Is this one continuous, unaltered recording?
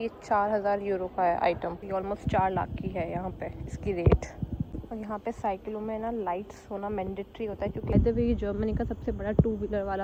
no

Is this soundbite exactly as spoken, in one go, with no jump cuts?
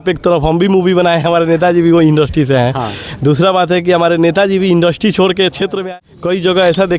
no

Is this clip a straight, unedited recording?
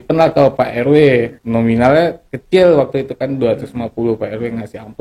no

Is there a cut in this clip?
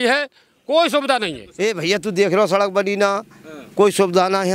yes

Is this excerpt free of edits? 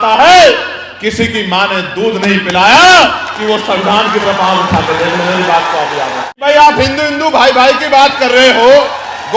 no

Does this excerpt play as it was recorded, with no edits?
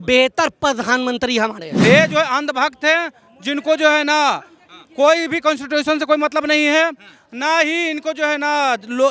no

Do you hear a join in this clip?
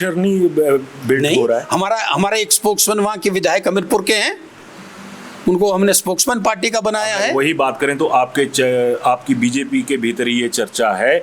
no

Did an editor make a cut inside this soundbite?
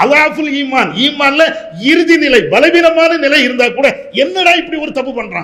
no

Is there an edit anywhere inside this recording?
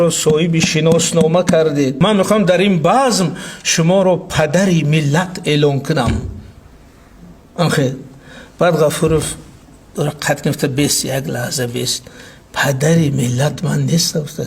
yes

